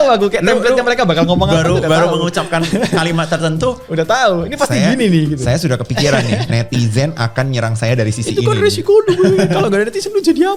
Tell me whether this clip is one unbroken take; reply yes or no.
yes